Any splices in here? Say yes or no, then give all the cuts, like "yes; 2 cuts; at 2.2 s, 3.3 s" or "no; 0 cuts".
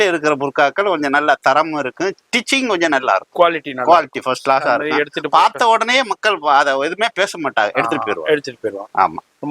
no; 0 cuts